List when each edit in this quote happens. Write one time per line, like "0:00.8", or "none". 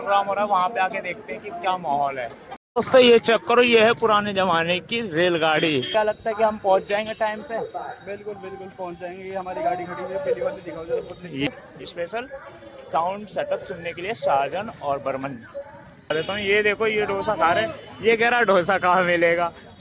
0:02.6
0:05.9
0:11.5
0:16.1